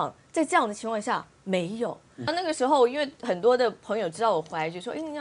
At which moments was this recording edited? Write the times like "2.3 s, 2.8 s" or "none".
2.3 s